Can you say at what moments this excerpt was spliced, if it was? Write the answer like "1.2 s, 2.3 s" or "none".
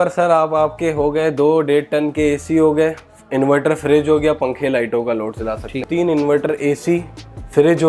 5.8 s